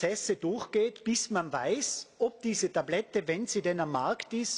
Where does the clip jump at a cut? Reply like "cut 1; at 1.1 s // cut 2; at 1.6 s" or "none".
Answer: none

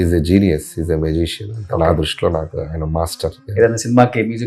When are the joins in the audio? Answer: cut 1; at 3.4 s

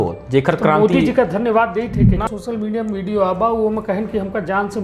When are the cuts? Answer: cut 1; at 2.2 s

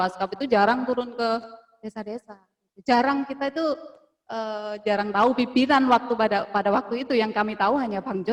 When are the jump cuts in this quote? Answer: none

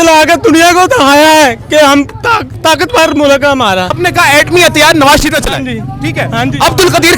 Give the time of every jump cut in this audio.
cut 1; at 2.5 s // cut 2; at 4.0 s

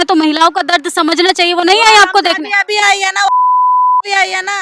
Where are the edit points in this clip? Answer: none

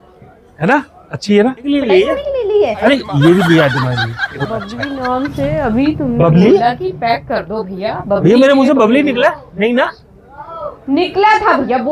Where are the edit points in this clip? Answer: cut 1; at 1.7 s // cut 2; at 4.3 s

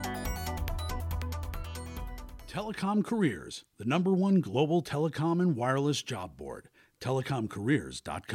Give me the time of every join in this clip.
cut 1; at 2.4 s

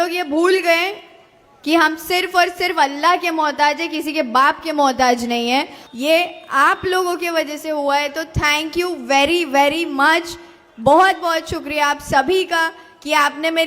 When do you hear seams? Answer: cut 1; at 5.8 s

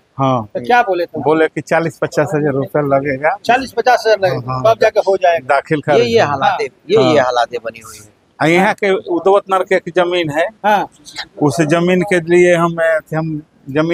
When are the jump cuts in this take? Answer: none

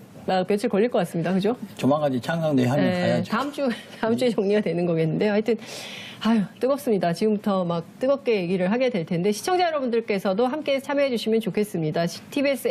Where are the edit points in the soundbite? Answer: none

